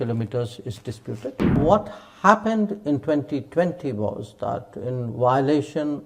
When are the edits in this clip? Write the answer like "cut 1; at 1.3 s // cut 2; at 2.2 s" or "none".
cut 1; at 1.6 s